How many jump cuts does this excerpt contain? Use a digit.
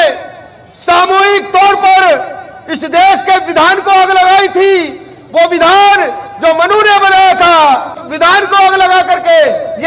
1